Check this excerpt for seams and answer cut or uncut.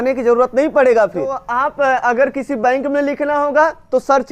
cut